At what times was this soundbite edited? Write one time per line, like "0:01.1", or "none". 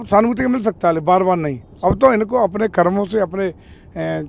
none